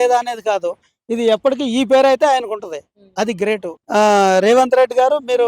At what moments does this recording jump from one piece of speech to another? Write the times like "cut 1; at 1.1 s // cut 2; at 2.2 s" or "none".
cut 1; at 3.7 s